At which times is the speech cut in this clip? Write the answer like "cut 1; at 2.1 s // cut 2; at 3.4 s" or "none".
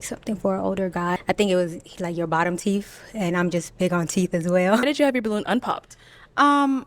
cut 1; at 1.2 s // cut 2; at 4.8 s